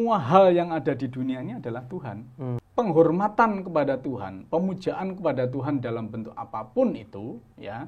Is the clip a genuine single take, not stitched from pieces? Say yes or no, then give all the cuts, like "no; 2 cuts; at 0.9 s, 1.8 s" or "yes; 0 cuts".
no; 1 cut; at 2.6 s